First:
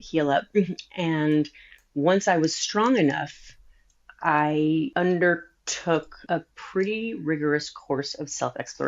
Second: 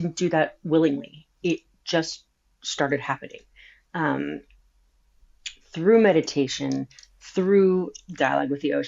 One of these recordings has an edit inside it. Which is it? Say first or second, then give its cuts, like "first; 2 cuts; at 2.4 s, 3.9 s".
first; 2 cuts; at 4.9 s, 6.1 s